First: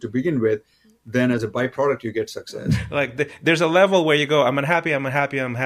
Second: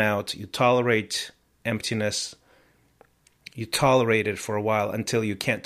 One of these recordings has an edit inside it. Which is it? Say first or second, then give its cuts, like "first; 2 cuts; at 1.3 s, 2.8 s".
first; 1 cut; at 2.8 s